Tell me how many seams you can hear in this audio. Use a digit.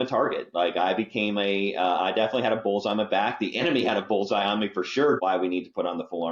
1